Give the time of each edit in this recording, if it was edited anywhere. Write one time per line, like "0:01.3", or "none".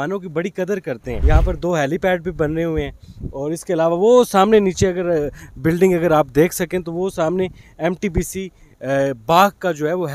0:01.1